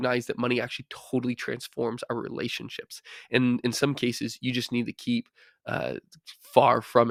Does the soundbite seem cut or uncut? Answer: uncut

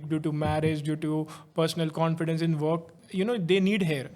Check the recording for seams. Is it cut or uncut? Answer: cut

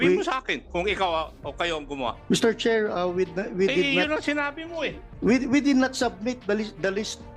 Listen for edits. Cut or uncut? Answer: uncut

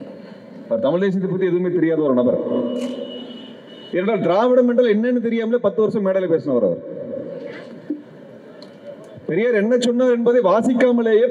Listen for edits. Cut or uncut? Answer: uncut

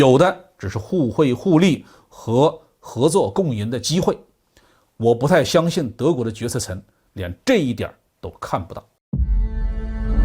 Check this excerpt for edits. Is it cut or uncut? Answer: cut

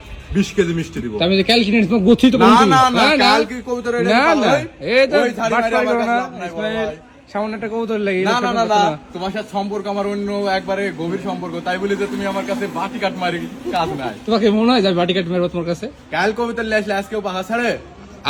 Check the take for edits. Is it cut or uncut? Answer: uncut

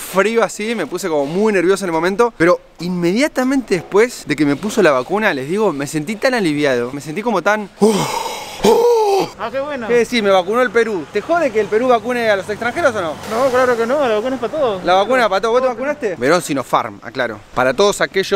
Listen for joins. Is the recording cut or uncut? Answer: cut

